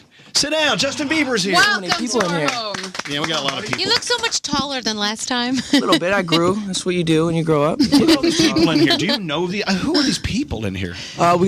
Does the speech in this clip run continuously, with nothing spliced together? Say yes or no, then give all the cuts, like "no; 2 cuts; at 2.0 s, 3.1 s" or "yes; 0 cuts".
no; 1 cut; at 1.4 s